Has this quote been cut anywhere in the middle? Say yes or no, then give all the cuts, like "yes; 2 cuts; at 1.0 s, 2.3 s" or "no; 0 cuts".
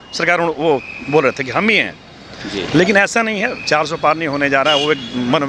no; 0 cuts